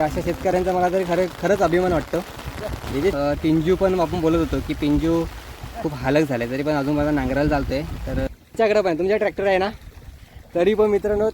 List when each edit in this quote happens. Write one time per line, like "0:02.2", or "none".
0:03.1
0:08.3